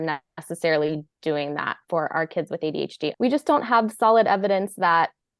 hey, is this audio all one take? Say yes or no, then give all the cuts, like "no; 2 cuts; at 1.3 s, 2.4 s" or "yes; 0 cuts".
no; 1 cut; at 3.1 s